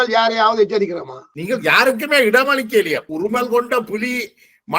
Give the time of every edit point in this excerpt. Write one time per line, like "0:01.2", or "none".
0:03.1